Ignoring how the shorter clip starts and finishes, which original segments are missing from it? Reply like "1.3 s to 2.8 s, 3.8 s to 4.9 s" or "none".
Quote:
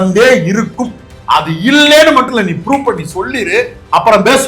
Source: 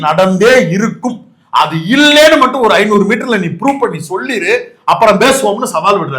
2.5 s to 3.2 s